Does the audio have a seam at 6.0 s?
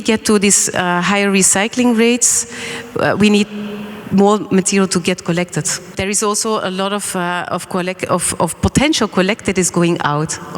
yes; 1 cut; at 6.0 s

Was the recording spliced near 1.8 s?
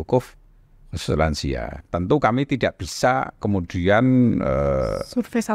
yes; 1 cut; at 1.8 s

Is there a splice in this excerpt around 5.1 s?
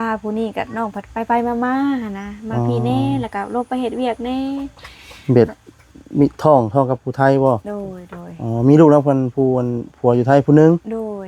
no; 0 cuts

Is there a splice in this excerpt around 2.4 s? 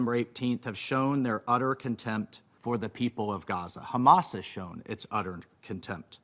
yes; 1 cut; at 2.4 s

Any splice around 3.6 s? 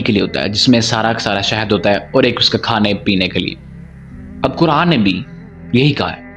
no; 0 cuts

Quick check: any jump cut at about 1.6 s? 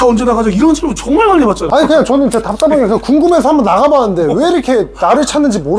yes; 1 cut; at 1.6 s

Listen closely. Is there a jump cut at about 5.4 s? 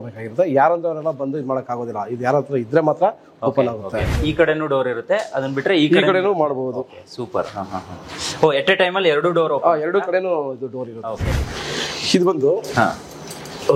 no; 2 cuts; at 4.0 s, 11.3 s

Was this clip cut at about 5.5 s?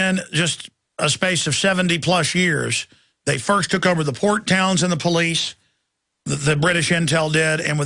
no; 0 cuts

